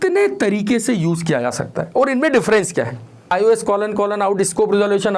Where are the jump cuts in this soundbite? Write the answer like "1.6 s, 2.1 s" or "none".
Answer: 3.2 s